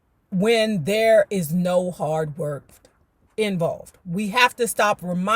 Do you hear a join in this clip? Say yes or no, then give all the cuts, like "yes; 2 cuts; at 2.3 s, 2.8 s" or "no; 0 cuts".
yes; 1 cut; at 2.7 s